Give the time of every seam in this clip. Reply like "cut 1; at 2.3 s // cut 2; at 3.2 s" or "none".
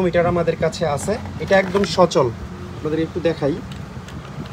none